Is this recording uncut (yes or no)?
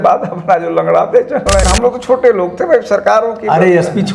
no